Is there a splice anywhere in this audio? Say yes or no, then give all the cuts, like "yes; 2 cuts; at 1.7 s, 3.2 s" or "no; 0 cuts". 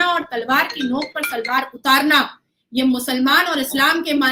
no; 0 cuts